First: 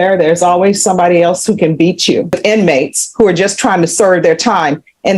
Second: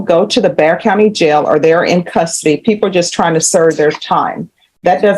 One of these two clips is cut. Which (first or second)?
first